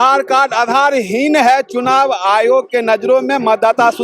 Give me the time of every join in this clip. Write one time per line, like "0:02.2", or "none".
none